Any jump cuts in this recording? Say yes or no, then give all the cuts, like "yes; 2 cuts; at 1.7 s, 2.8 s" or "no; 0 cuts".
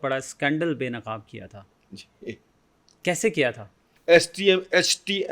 yes; 1 cut; at 3.9 s